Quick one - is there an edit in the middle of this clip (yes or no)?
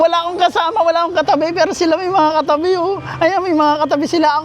no